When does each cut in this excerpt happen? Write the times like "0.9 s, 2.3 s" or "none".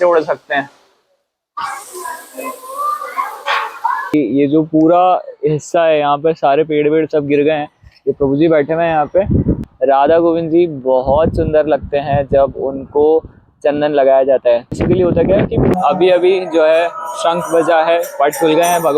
4.1 s, 9.7 s, 15.7 s

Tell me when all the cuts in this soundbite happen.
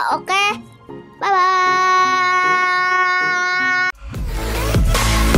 3.9 s

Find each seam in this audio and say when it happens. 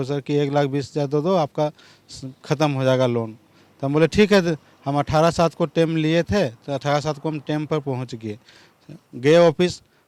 none

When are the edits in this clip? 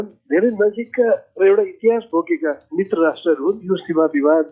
3.6 s

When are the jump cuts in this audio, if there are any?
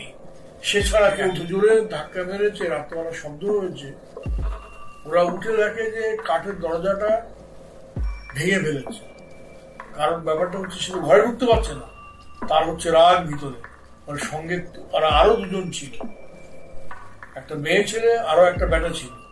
1.4 s

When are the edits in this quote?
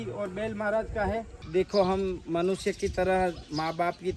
1.4 s

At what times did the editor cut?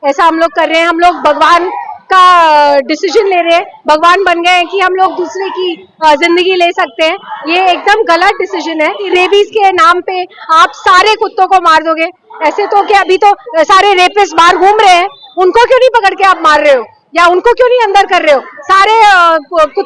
9.0 s

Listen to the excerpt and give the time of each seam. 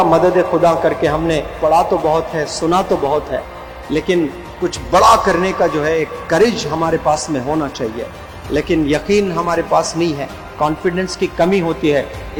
none

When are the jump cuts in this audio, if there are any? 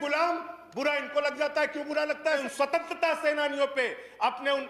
2.4 s

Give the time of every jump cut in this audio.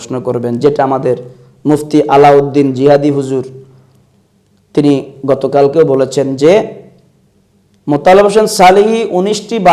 none

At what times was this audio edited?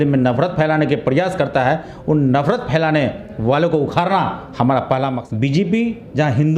5.2 s

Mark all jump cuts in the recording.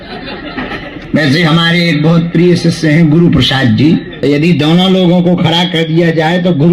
0.9 s, 4.1 s

